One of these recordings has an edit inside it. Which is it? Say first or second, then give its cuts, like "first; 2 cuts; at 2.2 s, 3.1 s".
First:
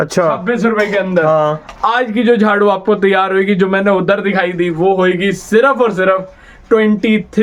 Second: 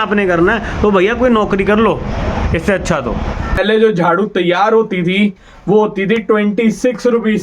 second; 1 cut; at 3.6 s